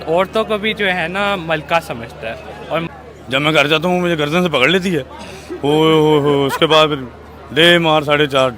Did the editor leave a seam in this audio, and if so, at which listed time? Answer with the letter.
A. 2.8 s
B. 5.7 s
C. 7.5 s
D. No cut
A